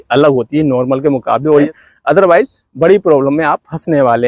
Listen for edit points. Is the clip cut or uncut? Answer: cut